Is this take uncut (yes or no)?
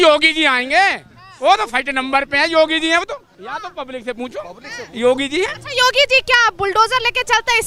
yes